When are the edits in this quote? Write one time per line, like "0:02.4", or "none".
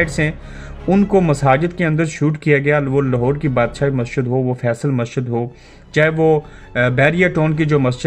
none